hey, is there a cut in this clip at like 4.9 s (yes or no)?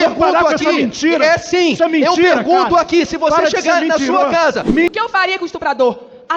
yes